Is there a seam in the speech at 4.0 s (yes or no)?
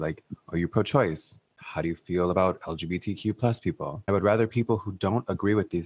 yes